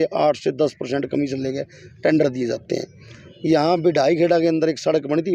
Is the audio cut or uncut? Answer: uncut